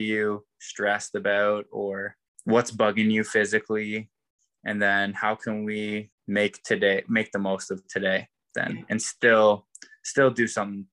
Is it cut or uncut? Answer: cut